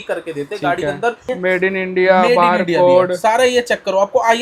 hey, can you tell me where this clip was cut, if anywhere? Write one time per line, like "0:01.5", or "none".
0:01.2